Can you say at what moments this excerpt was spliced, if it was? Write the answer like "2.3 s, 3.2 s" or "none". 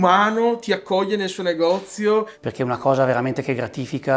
2.4 s